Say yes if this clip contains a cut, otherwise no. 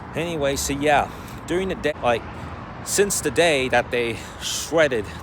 yes